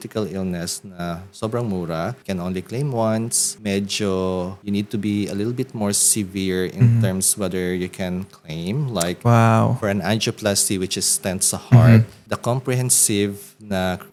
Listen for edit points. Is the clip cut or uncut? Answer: uncut